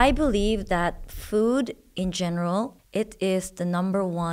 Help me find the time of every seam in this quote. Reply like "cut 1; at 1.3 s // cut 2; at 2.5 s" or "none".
cut 1; at 2.8 s